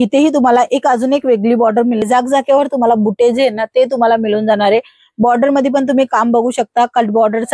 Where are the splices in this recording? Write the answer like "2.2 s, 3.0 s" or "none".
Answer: 2.0 s